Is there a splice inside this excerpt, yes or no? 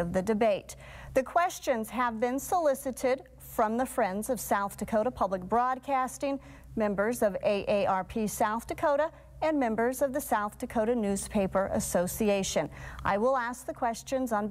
no